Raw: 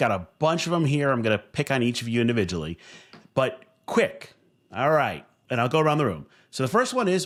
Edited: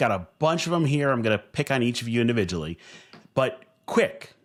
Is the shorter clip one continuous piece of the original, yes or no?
yes